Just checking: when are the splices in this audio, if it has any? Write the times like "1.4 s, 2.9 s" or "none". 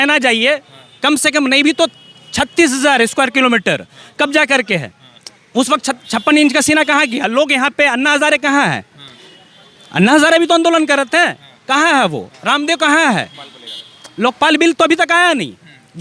none